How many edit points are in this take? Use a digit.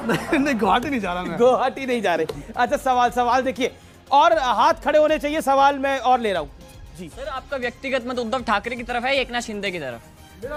0